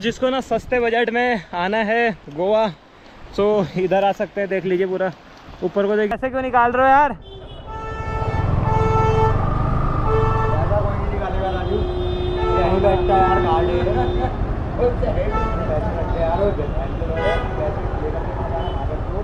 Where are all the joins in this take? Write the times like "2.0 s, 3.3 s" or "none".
6.1 s